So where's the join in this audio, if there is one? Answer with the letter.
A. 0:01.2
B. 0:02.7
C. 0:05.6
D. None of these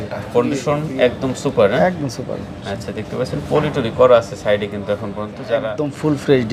C